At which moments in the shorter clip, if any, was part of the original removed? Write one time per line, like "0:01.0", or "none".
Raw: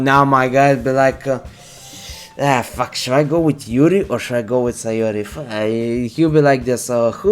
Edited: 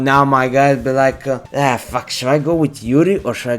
0:01.5